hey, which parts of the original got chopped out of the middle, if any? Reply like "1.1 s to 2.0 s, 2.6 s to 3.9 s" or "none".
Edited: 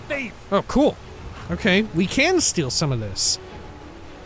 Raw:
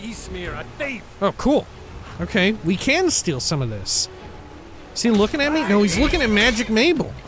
none